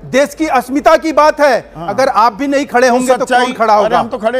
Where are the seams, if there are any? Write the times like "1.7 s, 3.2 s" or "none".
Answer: none